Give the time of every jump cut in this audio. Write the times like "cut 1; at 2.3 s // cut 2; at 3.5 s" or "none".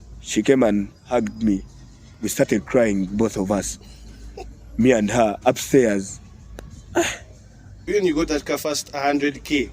cut 1; at 7.8 s